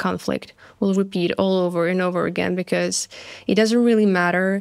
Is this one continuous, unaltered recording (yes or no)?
yes